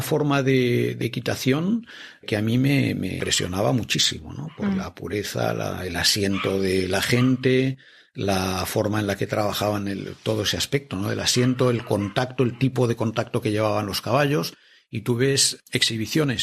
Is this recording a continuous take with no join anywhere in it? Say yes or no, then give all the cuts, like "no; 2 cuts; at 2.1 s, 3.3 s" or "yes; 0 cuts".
no; 3 cuts; at 1.0 s, 3.2 s, 15.5 s